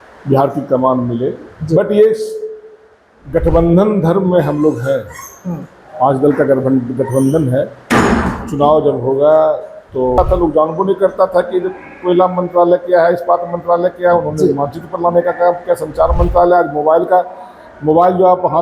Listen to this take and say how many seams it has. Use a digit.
1